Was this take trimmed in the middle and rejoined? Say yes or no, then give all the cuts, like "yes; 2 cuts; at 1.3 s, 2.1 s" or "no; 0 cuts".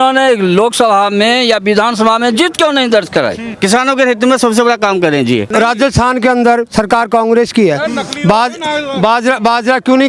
yes; 2 cuts; at 3.5 s, 5.5 s